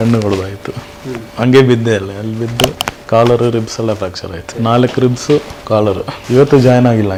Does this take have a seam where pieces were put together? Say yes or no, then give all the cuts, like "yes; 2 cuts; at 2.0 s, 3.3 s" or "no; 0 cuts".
no; 0 cuts